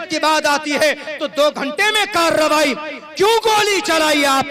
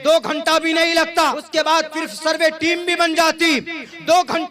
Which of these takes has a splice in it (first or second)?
second